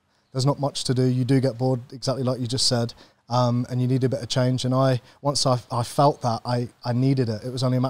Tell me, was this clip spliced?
no; 0 cuts

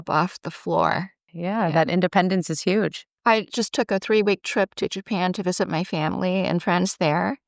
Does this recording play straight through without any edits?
no; 2 cuts; at 1.3 s, 3.1 s

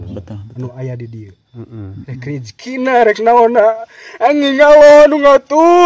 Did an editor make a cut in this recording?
no; 0 cuts

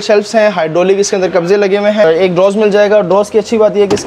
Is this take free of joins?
no; 1 cut; at 2.0 s

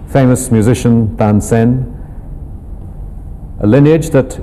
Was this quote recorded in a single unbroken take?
no; 1 cut; at 3.1 s

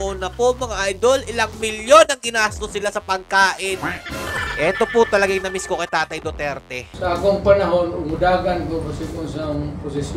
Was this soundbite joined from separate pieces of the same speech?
yes; 1 cut; at 4.1 s

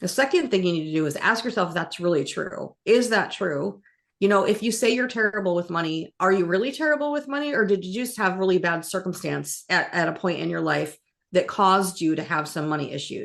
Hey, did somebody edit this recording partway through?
no; 0 cuts

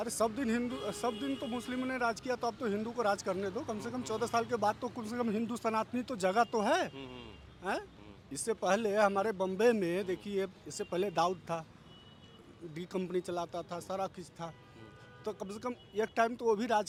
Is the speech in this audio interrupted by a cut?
no; 0 cuts

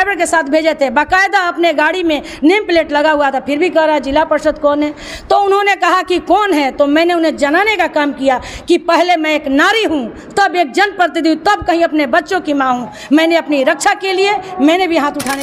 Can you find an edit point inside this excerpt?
no; 0 cuts

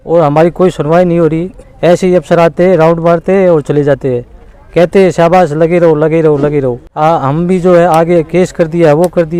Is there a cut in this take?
no; 0 cuts

